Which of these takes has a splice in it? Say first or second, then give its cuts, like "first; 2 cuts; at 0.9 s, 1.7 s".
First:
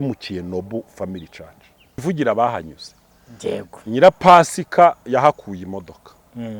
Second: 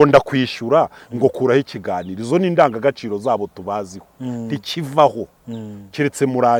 first; 1 cut; at 2.0 s